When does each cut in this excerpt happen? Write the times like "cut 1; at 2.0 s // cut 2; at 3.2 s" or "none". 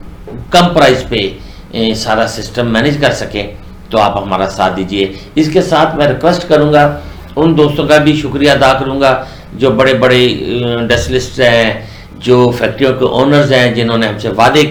none